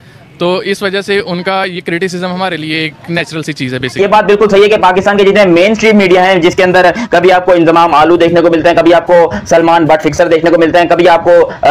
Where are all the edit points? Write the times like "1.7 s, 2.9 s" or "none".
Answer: 4.0 s